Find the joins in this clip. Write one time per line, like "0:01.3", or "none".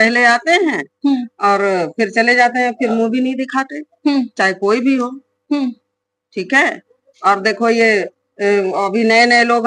none